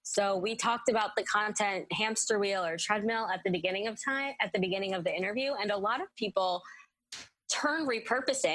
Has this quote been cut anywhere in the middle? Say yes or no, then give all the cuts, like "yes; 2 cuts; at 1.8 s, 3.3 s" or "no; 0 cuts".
no; 0 cuts